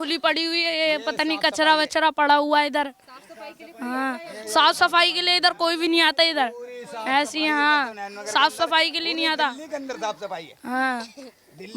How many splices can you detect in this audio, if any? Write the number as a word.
zero